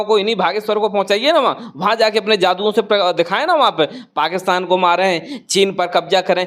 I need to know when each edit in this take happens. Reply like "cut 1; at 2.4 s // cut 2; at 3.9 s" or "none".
none